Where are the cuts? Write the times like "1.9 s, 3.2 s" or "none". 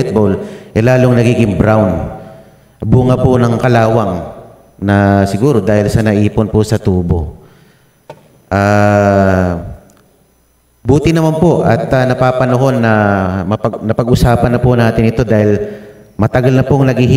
none